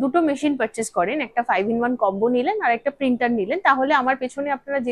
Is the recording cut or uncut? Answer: uncut